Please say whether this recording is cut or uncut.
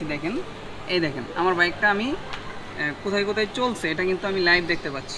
uncut